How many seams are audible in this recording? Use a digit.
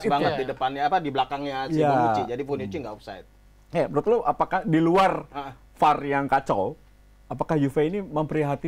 0